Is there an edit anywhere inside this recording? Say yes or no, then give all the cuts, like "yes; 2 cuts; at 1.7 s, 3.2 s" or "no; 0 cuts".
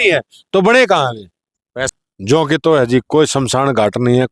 yes; 1 cut; at 1.9 s